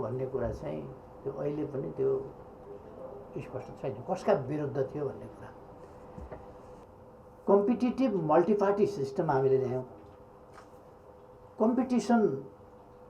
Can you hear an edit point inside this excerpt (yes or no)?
yes